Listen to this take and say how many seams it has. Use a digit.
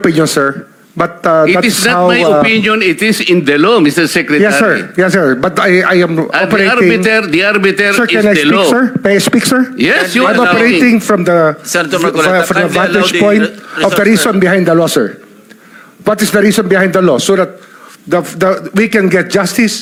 0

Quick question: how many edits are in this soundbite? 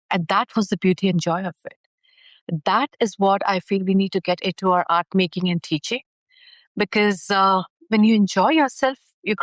0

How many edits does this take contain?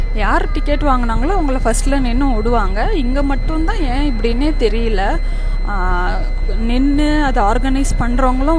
0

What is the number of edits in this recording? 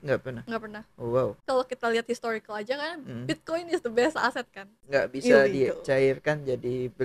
2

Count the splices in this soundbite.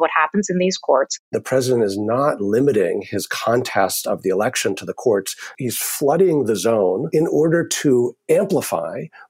3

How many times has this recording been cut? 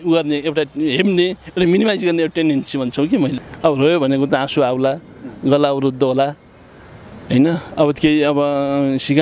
1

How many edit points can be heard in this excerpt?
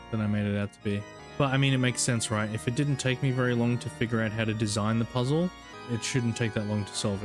2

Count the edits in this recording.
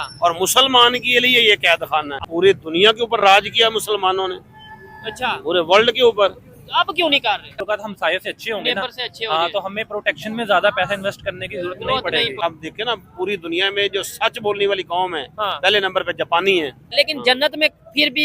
4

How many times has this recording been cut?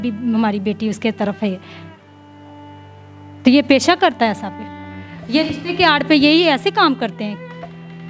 0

